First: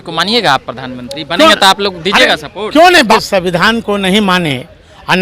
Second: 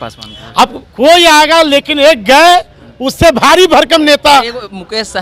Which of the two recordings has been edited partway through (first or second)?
first